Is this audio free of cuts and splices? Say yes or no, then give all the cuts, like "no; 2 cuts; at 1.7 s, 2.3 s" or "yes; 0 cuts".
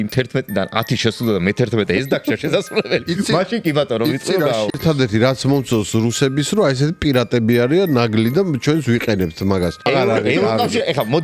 no; 2 cuts; at 4.7 s, 9.9 s